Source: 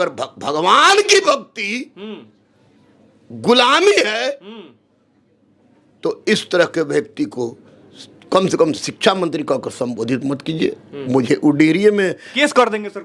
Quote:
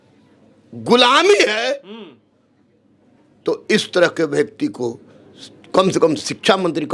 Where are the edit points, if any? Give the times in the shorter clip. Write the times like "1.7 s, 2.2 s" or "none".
none